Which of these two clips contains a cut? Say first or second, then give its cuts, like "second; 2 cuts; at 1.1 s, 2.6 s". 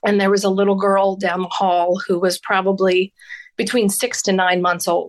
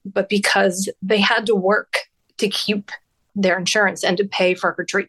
second; 2 cuts; at 2.2 s, 3.3 s